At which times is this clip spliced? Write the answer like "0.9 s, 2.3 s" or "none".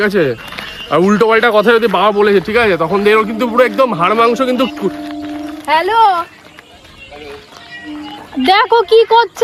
none

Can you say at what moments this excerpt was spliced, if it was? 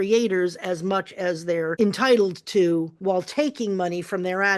1.7 s, 2.9 s

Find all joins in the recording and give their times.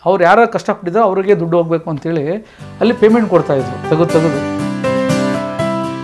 4.4 s

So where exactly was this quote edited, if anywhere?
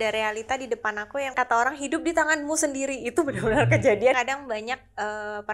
1.3 s, 4.2 s

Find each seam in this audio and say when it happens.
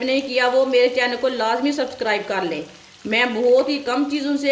none

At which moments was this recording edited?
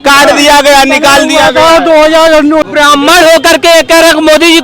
2.6 s

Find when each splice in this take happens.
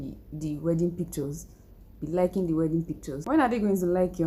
none

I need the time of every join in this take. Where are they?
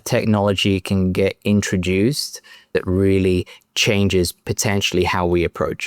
2.7 s

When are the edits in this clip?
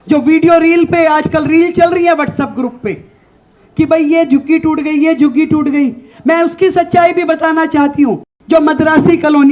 8.3 s

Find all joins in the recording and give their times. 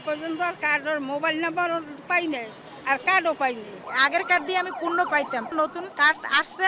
3.8 s, 5.5 s

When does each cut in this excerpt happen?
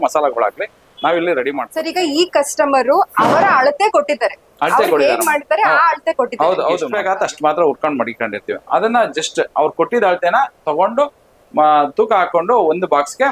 1.7 s, 6.9 s

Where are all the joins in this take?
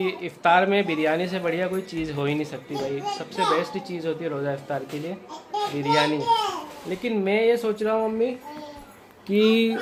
none

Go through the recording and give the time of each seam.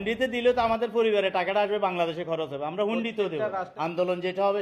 3.7 s

